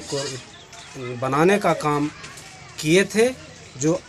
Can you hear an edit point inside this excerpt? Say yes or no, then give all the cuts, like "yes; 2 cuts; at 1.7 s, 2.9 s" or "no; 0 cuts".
no; 0 cuts